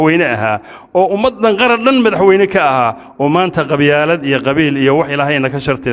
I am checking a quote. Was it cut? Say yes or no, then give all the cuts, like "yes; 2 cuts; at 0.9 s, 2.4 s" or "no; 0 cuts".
no; 0 cuts